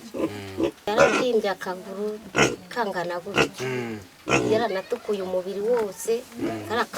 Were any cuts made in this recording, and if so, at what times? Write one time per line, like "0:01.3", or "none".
0:00.9